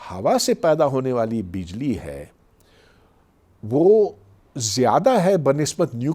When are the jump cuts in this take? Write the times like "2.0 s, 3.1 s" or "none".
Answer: none